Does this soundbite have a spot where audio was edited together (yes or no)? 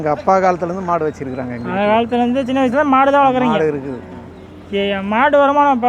no